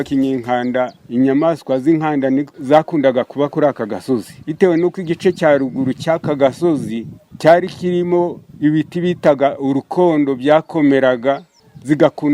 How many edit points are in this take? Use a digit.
3